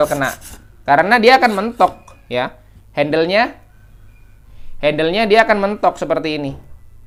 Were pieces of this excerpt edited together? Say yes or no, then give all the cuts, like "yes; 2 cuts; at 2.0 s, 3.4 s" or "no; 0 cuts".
no; 0 cuts